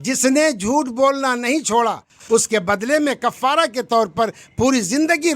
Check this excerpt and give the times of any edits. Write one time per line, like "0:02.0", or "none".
0:02.1